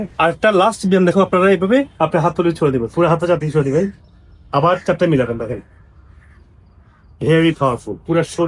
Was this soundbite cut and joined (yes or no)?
yes